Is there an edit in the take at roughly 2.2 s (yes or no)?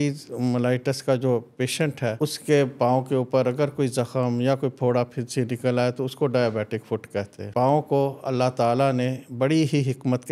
yes